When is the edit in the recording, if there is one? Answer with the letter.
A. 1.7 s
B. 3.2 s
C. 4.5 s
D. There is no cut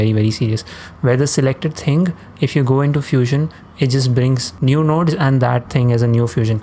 C